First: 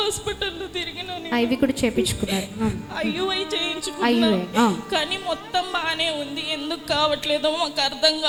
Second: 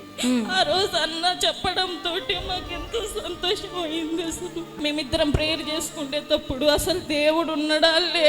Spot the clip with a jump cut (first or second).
second